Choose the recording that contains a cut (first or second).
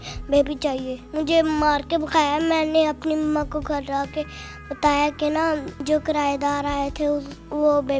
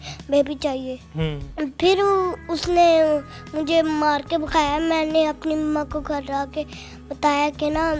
first